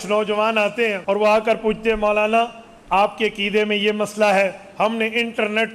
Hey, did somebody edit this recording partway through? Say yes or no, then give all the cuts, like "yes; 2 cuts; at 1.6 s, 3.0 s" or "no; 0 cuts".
yes; 1 cut; at 1.0 s